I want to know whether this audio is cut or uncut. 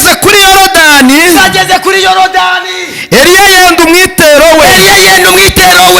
uncut